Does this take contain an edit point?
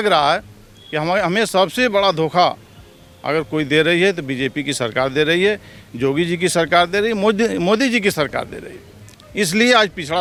no; 0 cuts

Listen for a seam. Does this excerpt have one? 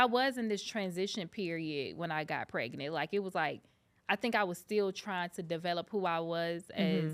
no; 0 cuts

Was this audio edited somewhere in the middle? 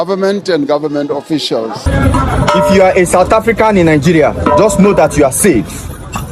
yes; 1 cut; at 1.9 s

